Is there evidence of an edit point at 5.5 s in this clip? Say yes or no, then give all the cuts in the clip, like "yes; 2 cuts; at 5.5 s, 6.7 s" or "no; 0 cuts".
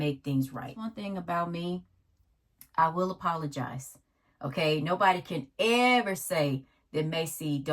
no; 1 cut; at 0.9 s